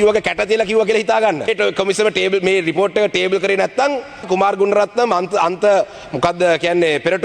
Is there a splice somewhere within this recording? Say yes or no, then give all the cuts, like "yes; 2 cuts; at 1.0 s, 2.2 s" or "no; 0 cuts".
yes; 2 cuts; at 1.5 s, 4.2 s